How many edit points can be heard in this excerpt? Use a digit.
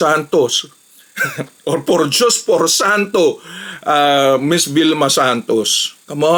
0